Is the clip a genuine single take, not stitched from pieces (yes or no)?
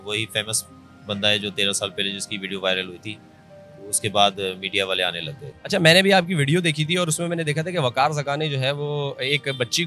yes